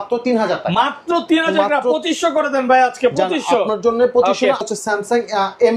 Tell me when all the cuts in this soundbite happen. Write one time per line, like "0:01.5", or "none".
0:04.6

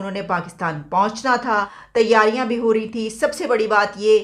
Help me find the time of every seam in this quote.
0:01.8

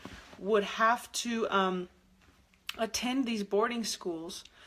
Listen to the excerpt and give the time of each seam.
0:01.4

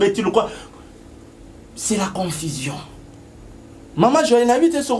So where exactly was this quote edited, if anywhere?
none

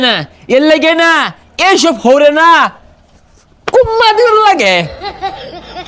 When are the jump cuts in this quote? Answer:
0:04.8

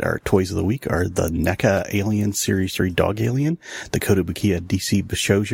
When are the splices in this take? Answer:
none

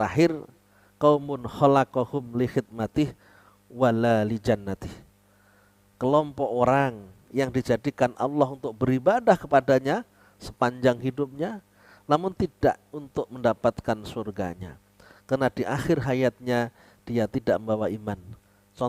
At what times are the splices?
none

